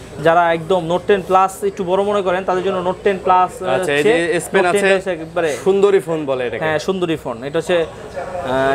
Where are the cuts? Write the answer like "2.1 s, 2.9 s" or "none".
none